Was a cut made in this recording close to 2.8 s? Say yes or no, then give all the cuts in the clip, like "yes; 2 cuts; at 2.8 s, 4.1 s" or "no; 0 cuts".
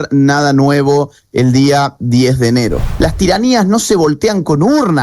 yes; 1 cut; at 2.8 s